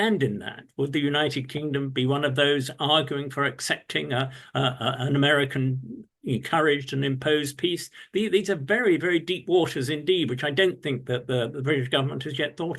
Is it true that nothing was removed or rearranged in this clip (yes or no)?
yes